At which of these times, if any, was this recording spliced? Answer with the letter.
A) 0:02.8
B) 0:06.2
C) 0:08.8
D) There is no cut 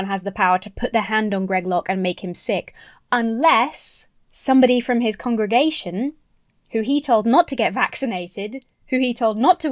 D